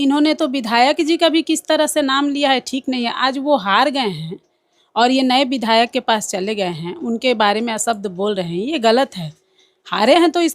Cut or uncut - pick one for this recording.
uncut